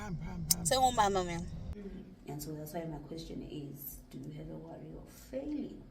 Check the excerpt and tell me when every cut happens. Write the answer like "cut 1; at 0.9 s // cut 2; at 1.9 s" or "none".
cut 1; at 1.7 s